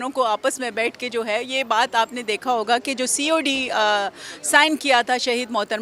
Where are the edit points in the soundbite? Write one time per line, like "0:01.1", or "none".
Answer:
none